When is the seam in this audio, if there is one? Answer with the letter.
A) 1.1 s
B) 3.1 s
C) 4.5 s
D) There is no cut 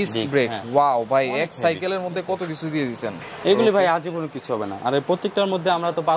B